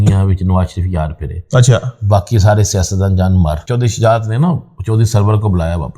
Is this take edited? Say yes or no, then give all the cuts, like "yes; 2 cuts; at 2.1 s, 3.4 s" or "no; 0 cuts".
yes; 1 cut; at 3.7 s